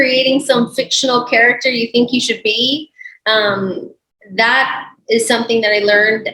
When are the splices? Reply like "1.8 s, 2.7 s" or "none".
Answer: none